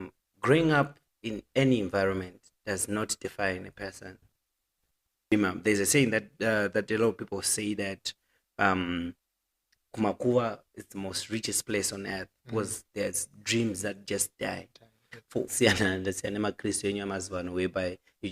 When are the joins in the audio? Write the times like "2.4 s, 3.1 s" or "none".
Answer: 5.3 s, 15.5 s